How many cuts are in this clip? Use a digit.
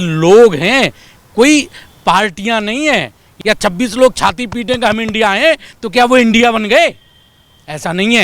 1